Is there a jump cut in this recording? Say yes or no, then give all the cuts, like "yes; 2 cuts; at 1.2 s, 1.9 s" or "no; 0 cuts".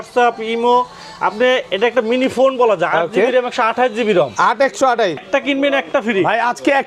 yes; 1 cut; at 5.2 s